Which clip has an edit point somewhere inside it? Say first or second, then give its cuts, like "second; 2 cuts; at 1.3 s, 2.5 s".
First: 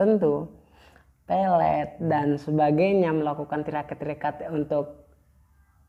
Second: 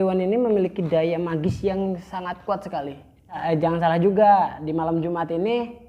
second; 1 cut; at 3.4 s